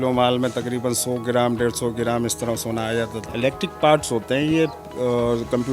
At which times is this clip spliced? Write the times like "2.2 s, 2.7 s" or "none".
3.2 s